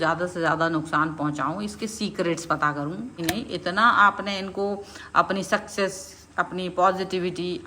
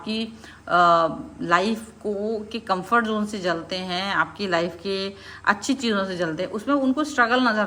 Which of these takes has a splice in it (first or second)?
first